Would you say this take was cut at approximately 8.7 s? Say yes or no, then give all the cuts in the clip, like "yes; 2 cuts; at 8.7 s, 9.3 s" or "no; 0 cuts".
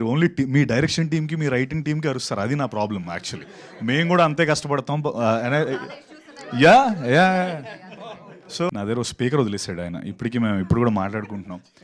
yes; 1 cut; at 8.7 s